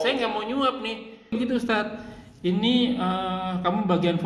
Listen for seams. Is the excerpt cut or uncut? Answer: cut